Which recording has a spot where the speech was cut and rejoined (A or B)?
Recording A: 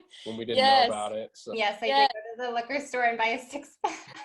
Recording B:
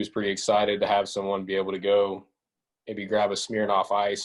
A